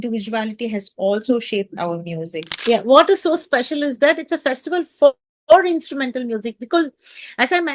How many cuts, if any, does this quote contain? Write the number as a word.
one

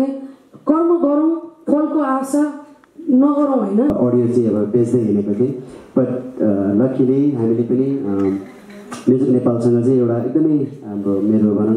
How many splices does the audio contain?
one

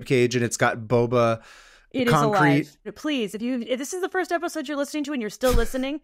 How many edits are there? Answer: one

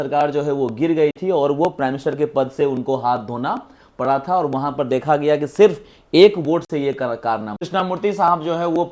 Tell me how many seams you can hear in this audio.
one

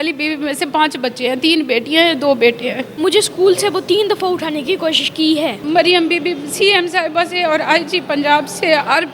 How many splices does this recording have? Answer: two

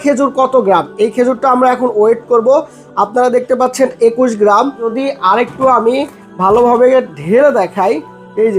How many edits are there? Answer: one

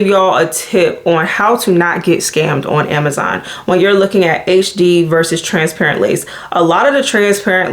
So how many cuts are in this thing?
zero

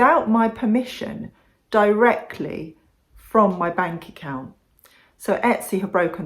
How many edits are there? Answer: one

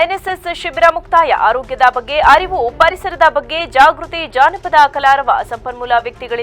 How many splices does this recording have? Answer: zero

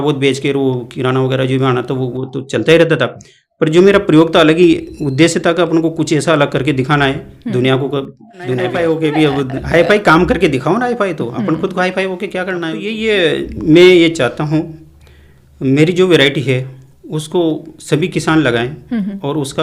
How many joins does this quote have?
two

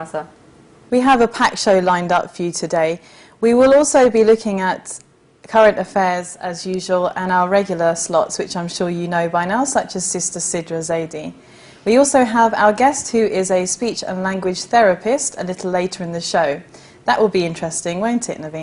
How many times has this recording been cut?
one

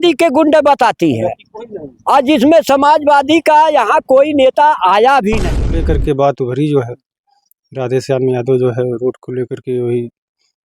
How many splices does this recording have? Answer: one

